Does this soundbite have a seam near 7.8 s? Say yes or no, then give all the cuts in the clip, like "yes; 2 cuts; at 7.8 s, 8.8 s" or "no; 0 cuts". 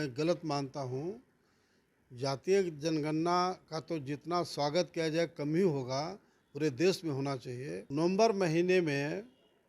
yes; 1 cut; at 7.8 s